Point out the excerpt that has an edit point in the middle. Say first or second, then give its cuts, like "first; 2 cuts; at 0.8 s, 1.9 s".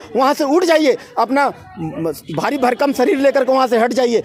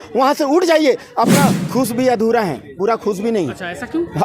second; 1 cut; at 1.6 s